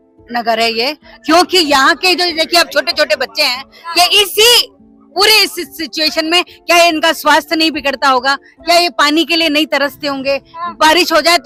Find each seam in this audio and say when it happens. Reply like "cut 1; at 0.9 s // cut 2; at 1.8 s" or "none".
none